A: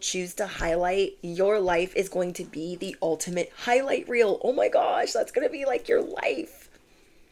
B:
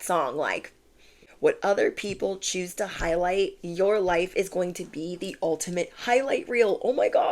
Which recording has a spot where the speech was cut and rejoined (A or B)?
B